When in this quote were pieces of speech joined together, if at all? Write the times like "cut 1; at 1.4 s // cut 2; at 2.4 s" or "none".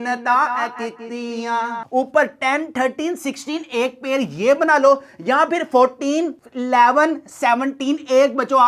cut 1; at 1.8 s